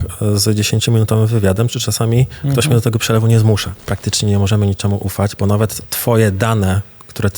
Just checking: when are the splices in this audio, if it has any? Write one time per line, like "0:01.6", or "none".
0:03.9
0:05.9